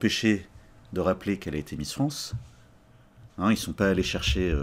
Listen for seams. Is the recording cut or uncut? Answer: uncut